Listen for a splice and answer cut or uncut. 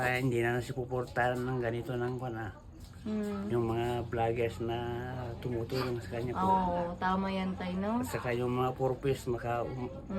uncut